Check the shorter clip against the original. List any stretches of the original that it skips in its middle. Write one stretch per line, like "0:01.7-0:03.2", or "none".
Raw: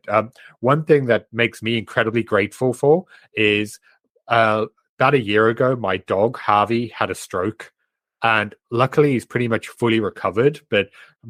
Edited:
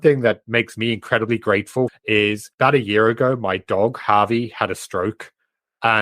0:02.9-0:04.4